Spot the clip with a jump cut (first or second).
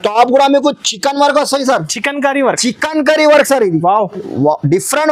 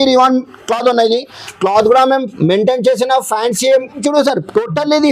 second